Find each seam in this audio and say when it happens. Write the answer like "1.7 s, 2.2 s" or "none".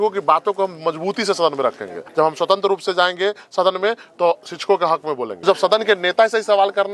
1.9 s, 5.3 s